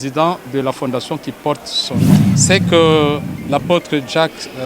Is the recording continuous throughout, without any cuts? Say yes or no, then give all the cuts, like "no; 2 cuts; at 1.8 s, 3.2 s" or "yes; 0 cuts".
no; 1 cut; at 2.3 s